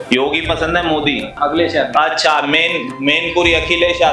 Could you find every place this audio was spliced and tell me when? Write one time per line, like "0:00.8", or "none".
0:01.3